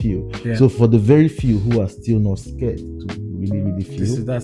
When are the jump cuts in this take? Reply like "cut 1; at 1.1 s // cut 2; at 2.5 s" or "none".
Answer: none